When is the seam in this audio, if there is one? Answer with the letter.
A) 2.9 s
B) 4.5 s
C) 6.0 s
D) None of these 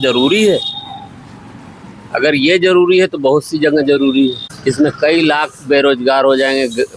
B